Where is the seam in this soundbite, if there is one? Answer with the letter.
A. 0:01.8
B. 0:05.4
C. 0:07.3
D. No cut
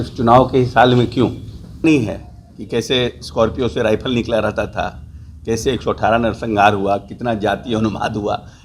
A